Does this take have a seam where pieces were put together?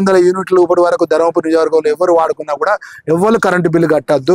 no; 0 cuts

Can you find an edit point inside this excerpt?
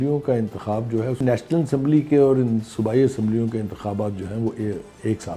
yes; 1 cut; at 1.2 s

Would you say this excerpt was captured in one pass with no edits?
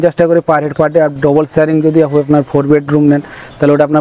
yes; 0 cuts

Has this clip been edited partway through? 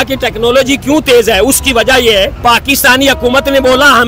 yes; 2 cuts; at 1.4 s, 2.3 s

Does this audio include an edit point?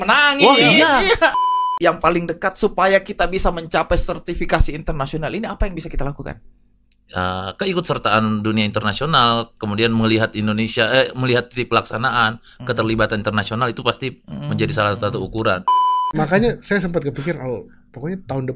yes; 2 cuts; at 1.4 s, 16.1 s

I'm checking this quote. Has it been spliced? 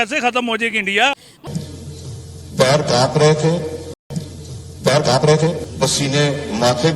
yes; 1 cut; at 1.4 s

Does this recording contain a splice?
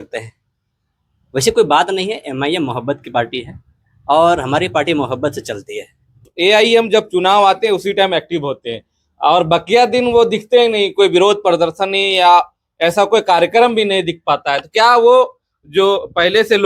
yes; 1 cut; at 6.3 s

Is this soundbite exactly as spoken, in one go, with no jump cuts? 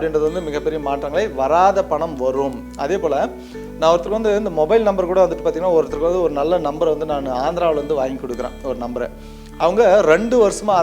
yes; 0 cuts

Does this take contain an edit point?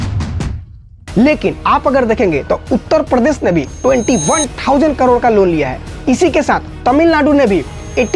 no; 0 cuts

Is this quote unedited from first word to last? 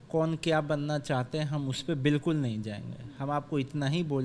yes; 0 cuts

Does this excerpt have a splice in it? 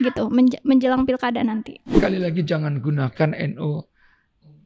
yes; 1 cut; at 1.8 s

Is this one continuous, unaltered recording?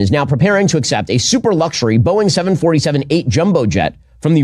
yes; 0 cuts

